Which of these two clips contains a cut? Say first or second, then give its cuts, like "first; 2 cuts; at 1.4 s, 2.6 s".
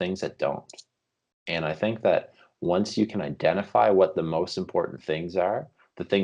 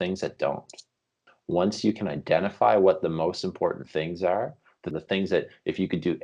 second; 2 cuts; at 1.3 s, 4.8 s